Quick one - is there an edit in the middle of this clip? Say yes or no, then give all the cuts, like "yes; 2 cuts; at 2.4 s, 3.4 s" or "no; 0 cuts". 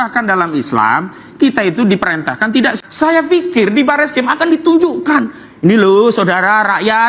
yes; 1 cut; at 2.8 s